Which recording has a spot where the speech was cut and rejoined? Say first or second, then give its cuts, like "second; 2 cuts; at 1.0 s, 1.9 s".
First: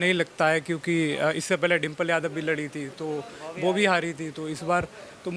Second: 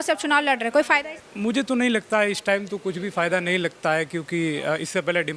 second; 1 cut; at 1.2 s